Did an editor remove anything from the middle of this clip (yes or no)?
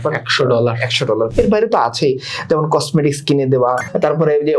yes